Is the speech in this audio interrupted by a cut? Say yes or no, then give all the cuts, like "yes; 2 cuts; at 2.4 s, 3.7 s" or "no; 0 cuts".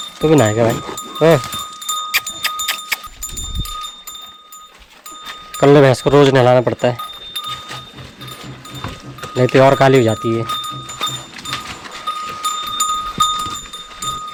no; 0 cuts